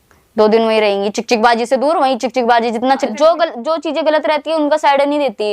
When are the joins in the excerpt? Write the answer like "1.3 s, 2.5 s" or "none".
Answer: 3.0 s